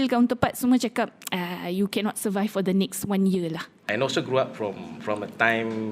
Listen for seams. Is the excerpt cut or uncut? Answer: cut